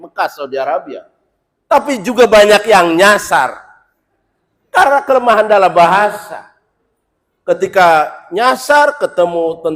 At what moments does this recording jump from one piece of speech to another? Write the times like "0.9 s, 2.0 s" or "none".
none